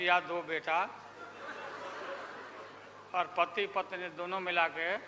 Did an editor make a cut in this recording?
no; 0 cuts

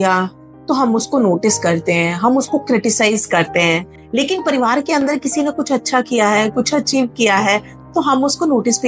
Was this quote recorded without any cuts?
yes; 0 cuts

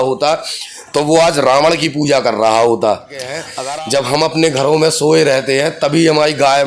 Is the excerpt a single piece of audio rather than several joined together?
no; 1 cut; at 3.5 s

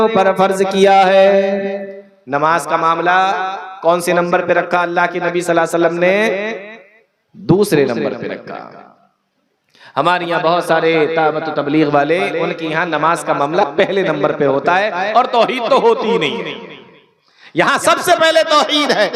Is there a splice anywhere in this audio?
no; 0 cuts

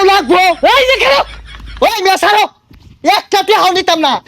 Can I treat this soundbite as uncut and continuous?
no; 1 cut; at 1.3 s

